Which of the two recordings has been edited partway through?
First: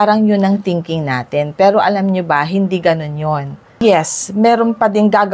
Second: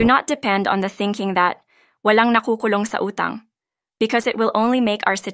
first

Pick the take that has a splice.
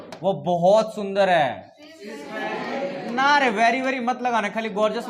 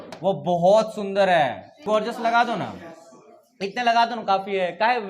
second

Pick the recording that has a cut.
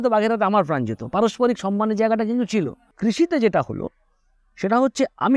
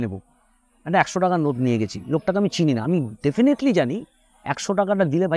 first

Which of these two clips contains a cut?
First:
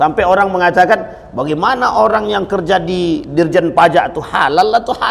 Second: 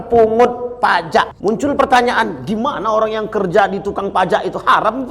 second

